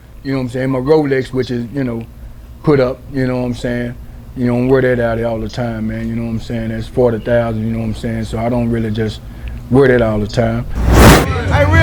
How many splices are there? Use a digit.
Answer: 1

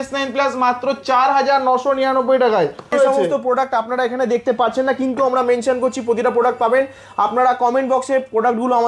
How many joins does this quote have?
1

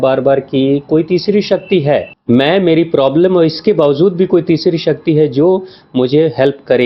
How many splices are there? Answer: 1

